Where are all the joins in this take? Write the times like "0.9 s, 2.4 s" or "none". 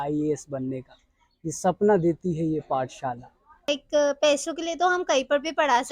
3.6 s